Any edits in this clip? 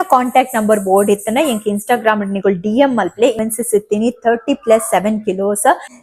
yes; 1 cut; at 3.4 s

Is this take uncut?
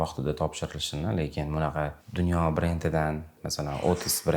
no; 1 cut; at 3.4 s

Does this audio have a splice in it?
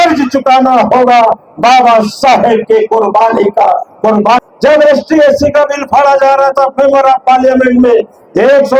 yes; 1 cut; at 4.4 s

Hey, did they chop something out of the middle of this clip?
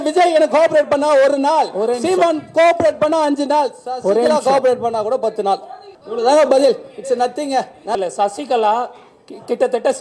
yes; 1 cut; at 8.0 s

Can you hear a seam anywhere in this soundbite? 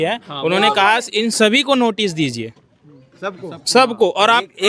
no; 0 cuts

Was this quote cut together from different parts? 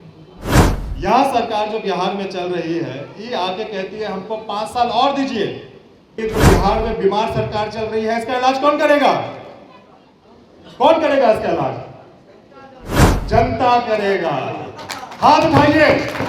yes; 1 cut; at 6.2 s

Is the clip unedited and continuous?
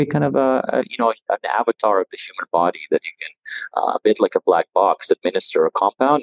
yes; 0 cuts

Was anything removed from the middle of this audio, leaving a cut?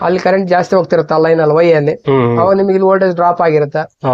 no; 0 cuts

